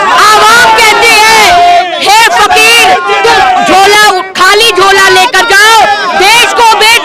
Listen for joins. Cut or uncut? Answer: uncut